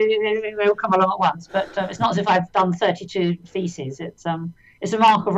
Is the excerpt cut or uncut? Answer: cut